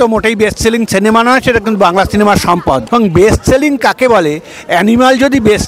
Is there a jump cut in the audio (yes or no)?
yes